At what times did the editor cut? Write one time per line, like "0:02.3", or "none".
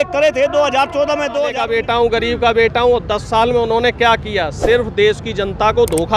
0:01.6